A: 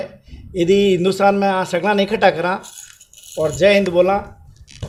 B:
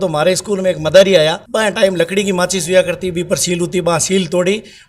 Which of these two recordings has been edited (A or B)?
B